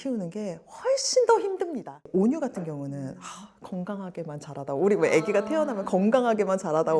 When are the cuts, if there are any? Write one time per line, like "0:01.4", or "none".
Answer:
none